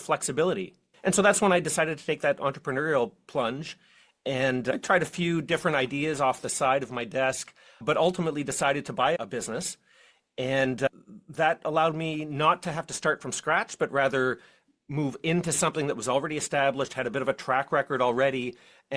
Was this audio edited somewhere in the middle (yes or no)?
no